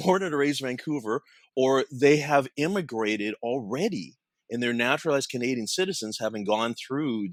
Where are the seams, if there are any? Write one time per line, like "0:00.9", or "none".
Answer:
none